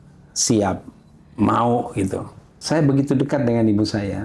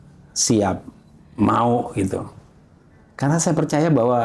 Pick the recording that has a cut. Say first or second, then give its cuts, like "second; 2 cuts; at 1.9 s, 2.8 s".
first; 1 cut; at 2.6 s